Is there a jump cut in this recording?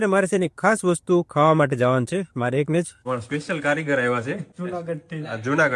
yes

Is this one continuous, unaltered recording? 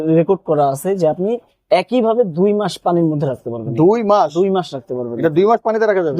yes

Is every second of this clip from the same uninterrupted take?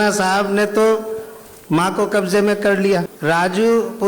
no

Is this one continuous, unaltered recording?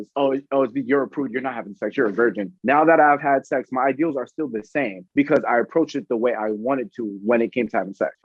yes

